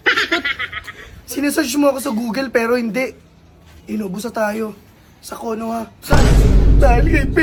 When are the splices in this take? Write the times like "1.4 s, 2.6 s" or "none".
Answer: none